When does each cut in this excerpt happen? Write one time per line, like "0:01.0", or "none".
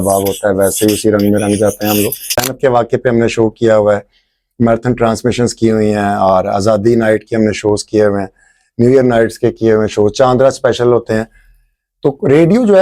0:02.5